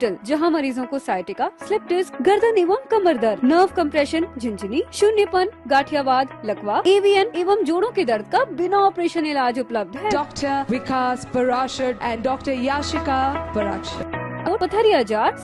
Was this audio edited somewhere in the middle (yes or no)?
yes